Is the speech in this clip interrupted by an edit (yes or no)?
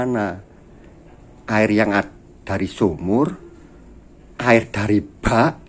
no